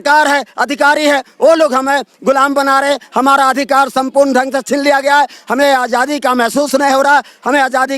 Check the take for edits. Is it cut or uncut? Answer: uncut